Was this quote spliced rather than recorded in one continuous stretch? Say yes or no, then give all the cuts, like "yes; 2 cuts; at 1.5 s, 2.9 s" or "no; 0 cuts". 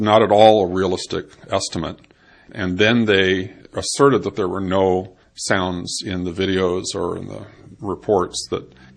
yes; 1 cut; at 7.2 s